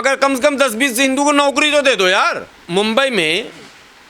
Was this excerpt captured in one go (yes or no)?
no